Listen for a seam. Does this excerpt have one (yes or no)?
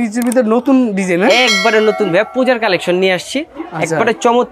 no